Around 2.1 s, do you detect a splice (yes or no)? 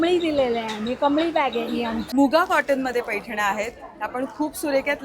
yes